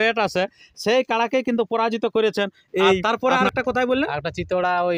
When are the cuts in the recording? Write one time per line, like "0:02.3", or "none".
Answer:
0:03.0